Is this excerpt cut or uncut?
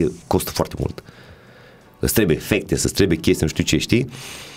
uncut